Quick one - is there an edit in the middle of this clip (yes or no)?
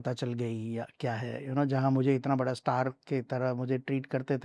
no